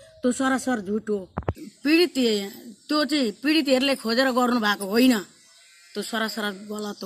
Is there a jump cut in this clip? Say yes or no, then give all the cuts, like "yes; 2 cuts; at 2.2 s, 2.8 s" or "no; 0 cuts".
yes; 1 cut; at 1.6 s